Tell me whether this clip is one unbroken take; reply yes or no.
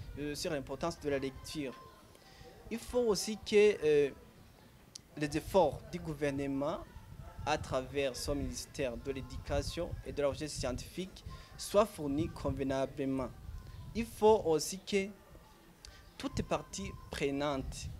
yes